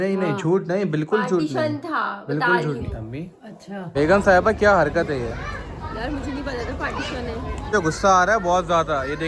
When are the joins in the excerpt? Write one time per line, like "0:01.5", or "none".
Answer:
0:03.9
0:07.7